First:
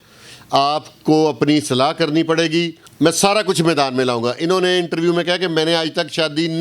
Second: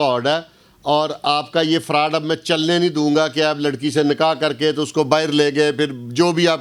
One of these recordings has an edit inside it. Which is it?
first; 1 cut; at 2.8 s

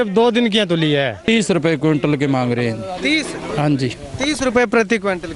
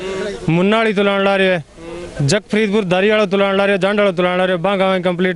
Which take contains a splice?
first; 1 cut; at 1.2 s

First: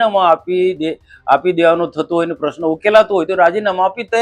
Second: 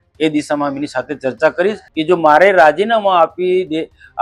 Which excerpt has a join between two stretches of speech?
second; 1 cut; at 1.9 s

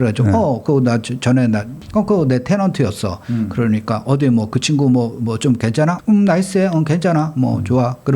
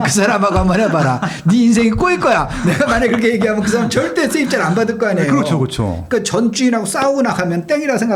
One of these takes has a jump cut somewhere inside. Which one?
first; 2 cuts; at 1.8 s, 6.0 s

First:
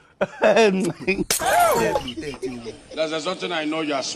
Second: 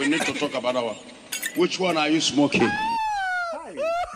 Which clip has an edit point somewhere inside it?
first; 1 cut; at 1.3 s

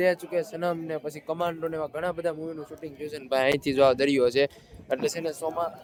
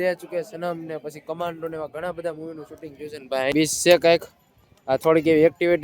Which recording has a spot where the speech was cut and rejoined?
second; 1 cut; at 3.5 s

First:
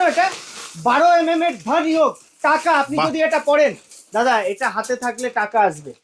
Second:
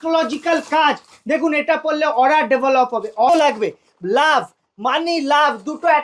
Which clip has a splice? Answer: second; 1 cut; at 3.3 s

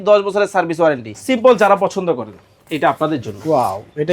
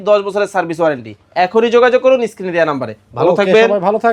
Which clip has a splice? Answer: first; 1 cut; at 1.1 s

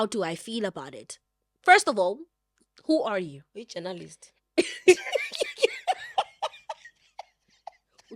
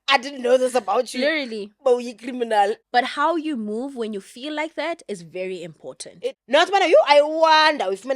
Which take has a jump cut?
second; 2 cuts; at 2.8 s, 6.3 s

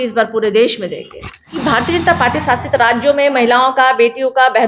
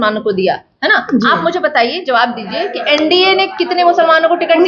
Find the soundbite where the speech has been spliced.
first; 1 cut; at 1.5 s

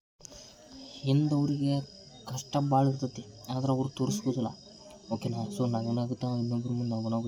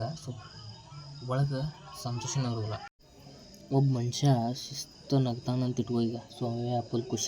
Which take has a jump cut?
second; 1 cut; at 3.0 s

